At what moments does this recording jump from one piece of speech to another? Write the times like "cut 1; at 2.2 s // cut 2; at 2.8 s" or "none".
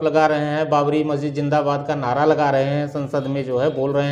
none